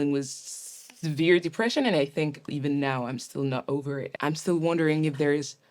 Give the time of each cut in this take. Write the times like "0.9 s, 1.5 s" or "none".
2.5 s, 4.1 s